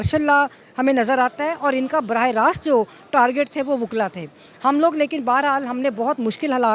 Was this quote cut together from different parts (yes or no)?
no